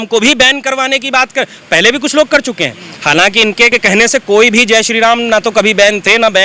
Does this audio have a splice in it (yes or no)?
no